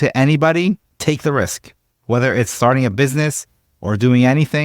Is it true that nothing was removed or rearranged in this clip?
no; 1 cut; at 0.9 s

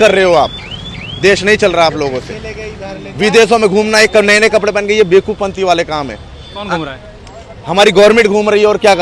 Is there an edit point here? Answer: no; 0 cuts

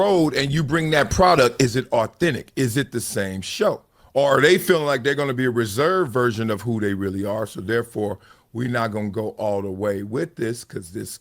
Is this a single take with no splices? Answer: no; 1 cut; at 3.9 s

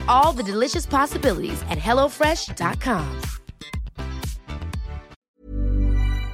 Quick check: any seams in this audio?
yes; 1 cut; at 5.1 s

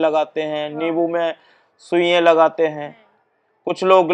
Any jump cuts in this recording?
no; 0 cuts

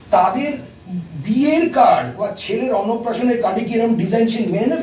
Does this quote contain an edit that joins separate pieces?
no; 0 cuts

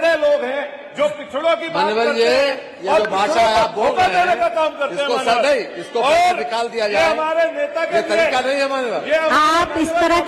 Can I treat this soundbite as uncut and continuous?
yes; 0 cuts

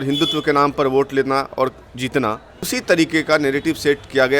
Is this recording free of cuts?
no; 1 cut; at 2.7 s

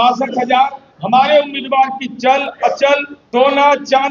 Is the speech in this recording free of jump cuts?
no; 1 cut; at 3.2 s

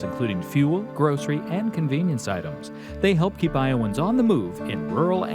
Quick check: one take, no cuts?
yes; 0 cuts

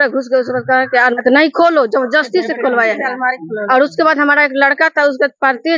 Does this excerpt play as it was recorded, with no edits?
no; 1 cut; at 1.1 s

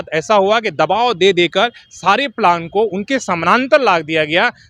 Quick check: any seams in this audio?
no; 0 cuts

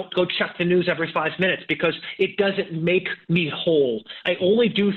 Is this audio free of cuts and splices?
yes; 0 cuts

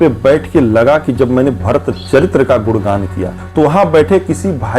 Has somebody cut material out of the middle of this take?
yes; 1 cut; at 3.4 s

